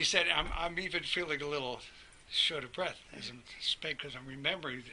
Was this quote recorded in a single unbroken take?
yes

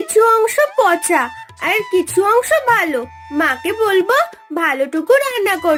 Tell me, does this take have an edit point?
no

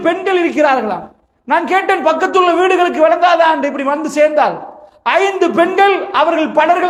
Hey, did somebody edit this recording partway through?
no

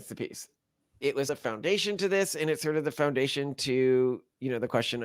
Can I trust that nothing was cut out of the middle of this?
no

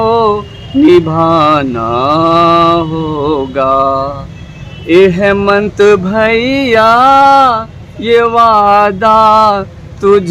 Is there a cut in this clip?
no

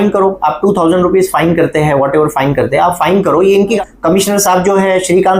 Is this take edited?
yes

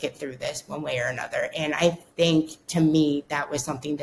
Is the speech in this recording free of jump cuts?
yes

